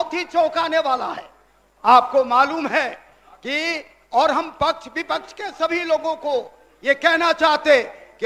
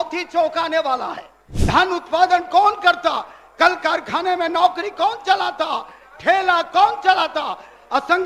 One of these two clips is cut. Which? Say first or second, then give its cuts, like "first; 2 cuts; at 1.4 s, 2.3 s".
second; 1 cut; at 1.5 s